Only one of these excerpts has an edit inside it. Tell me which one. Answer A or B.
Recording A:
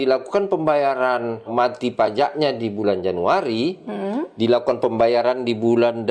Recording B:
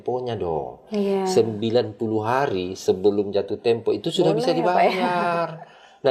A